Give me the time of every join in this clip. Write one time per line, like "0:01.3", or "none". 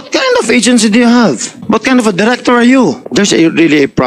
0:01.5
0:03.0